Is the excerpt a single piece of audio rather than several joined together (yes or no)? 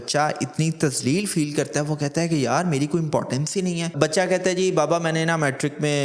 no